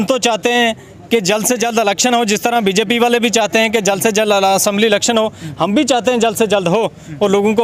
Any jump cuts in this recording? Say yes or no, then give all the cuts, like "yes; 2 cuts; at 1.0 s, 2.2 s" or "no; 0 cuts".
no; 0 cuts